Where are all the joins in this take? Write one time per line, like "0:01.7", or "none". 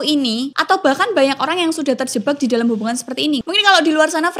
0:03.4